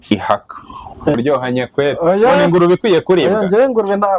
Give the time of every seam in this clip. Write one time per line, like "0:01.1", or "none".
0:01.2